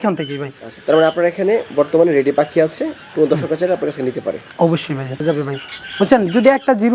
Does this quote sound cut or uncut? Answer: cut